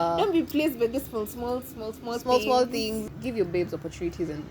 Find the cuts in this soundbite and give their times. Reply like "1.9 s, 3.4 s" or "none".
3.2 s

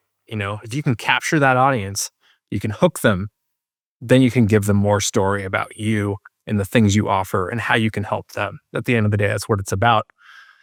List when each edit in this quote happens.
none

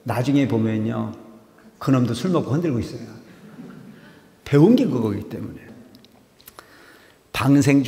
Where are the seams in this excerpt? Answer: 5.7 s

